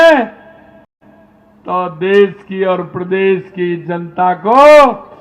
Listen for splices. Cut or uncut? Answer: uncut